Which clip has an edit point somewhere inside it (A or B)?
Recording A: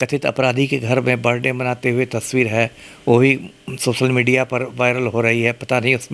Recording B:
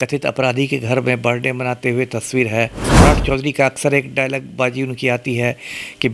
B